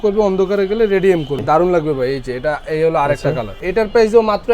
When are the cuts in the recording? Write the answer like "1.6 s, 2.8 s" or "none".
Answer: 1.4 s, 3.6 s